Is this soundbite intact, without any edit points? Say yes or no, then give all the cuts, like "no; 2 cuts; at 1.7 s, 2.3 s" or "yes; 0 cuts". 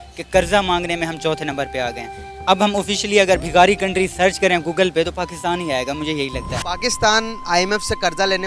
no; 1 cut; at 6.3 s